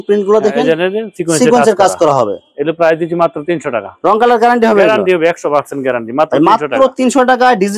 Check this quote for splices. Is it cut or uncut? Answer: uncut